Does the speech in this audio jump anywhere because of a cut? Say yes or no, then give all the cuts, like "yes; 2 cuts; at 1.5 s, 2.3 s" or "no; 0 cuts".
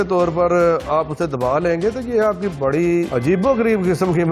yes; 1 cut; at 3.1 s